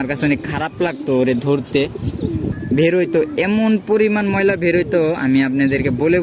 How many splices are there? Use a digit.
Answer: 1